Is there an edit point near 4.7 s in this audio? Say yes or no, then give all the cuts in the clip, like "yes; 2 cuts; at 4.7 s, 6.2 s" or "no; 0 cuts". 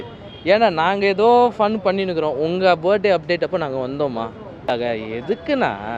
yes; 1 cut; at 4.7 s